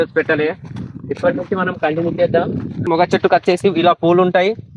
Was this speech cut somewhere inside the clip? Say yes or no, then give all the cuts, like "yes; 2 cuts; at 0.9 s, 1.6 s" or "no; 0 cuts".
yes; 1 cut; at 2.9 s